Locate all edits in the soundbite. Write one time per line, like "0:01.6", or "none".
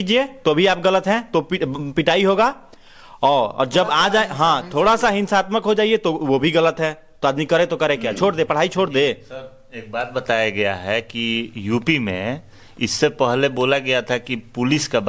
none